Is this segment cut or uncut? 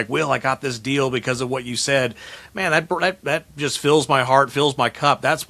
uncut